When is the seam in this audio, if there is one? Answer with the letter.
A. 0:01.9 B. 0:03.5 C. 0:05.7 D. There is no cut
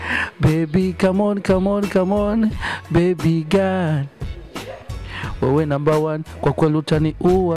D